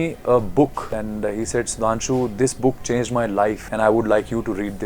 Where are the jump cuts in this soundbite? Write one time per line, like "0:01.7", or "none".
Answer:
0:00.9
0:03.6